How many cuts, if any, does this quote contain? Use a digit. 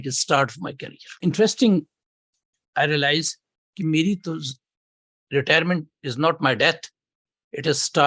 1